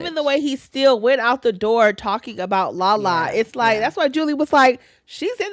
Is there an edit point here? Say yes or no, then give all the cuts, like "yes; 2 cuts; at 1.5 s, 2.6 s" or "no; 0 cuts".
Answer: no; 0 cuts